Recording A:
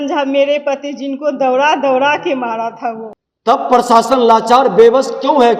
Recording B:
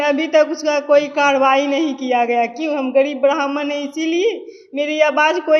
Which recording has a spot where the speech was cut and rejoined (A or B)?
A